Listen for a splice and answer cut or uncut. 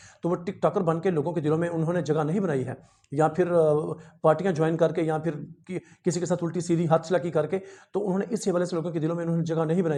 uncut